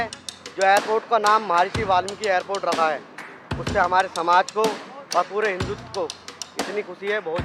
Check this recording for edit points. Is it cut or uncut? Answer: uncut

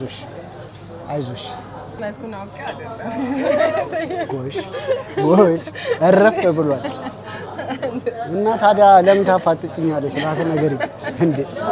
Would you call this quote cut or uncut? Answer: cut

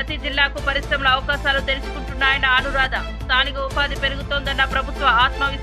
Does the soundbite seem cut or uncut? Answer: uncut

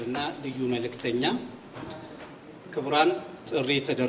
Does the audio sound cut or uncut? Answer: uncut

